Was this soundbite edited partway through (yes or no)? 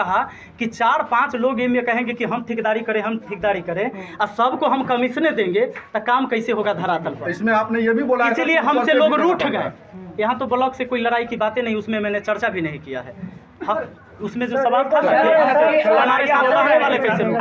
no